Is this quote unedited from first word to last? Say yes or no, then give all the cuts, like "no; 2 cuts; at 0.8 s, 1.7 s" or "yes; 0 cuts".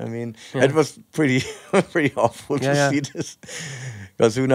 yes; 0 cuts